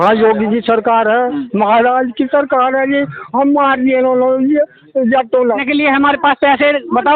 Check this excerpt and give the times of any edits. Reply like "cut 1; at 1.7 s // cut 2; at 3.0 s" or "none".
cut 1; at 5.6 s